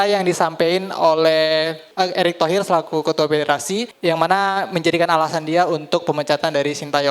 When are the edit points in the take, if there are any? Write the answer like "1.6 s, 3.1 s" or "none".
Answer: 1.8 s, 3.9 s